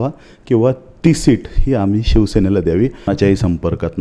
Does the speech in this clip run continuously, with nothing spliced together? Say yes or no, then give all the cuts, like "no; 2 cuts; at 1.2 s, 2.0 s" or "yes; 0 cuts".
no; 1 cut; at 3.0 s